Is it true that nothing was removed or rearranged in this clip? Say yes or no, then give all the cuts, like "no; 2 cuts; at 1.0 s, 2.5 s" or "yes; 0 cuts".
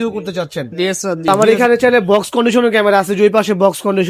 no; 1 cut; at 1.3 s